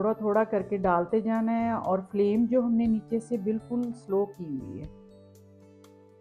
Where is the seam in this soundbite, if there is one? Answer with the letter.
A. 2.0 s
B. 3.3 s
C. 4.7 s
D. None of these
D